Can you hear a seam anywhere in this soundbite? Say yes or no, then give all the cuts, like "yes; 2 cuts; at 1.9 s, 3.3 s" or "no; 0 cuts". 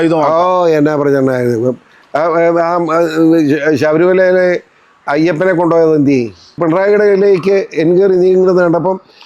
yes; 1 cut; at 6.6 s